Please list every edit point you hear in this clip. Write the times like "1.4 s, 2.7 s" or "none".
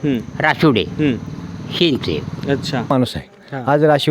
2.9 s